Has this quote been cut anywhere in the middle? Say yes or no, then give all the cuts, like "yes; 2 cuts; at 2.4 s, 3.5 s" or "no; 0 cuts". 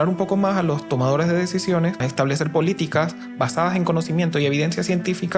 yes; 1 cut; at 2.1 s